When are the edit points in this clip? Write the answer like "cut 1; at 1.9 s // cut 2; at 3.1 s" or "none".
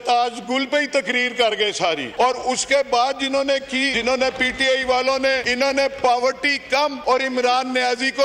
cut 1; at 2.1 s // cut 2; at 3.9 s // cut 3; at 5.5 s // cut 4; at 7.0 s